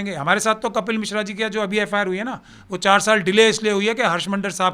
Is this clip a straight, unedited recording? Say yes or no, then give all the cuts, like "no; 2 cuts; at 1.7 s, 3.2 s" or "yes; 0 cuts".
yes; 0 cuts